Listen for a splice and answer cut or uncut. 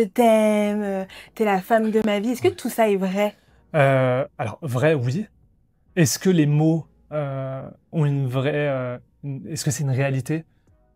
uncut